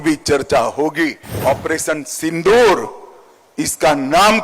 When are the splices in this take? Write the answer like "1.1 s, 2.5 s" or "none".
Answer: 1.4 s